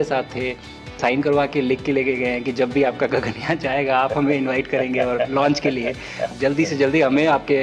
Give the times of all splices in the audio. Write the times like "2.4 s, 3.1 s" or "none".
1.0 s, 6.3 s